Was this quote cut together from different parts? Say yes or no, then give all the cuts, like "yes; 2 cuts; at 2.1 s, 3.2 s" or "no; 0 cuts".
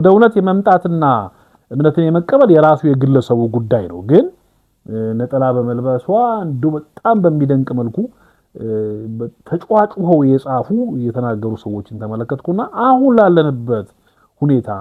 no; 0 cuts